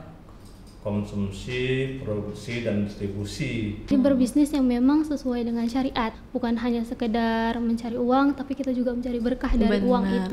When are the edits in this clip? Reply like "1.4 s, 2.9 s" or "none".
3.9 s, 6.2 s

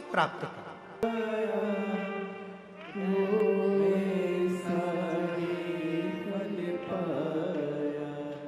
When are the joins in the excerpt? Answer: 1.0 s

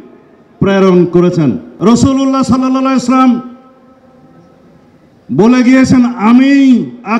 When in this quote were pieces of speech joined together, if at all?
1.7 s

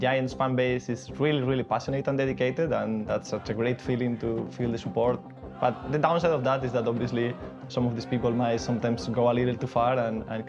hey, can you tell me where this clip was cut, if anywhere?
none

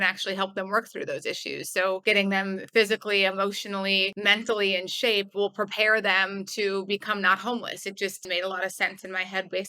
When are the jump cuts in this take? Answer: 2.0 s, 4.1 s, 8.3 s

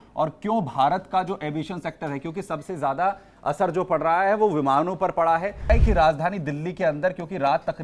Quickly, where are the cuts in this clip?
5.7 s

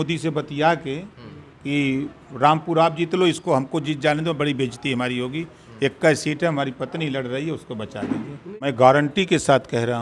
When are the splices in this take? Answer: 8.6 s

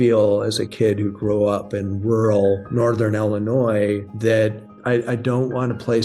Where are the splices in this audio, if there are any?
2.7 s, 4.1 s, 4.8 s

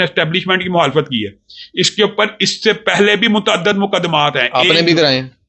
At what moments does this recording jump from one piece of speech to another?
none

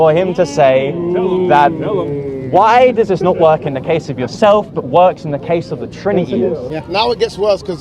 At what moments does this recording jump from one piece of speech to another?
6.7 s

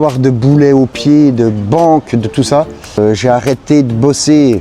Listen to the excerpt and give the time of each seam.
3.0 s

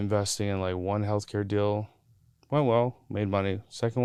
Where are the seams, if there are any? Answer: none

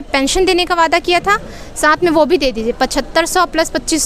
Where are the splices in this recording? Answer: none

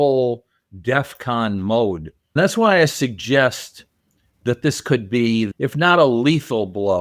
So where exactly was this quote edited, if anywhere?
2.4 s, 5.5 s

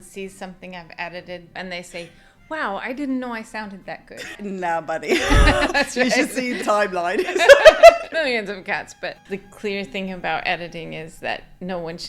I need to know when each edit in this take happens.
1.5 s, 4.4 s, 6.6 s, 8.1 s, 9.2 s

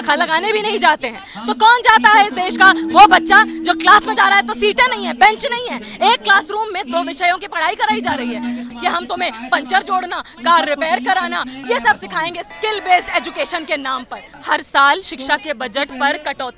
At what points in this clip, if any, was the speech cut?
8.7 s, 11.6 s, 12.5 s, 14.3 s

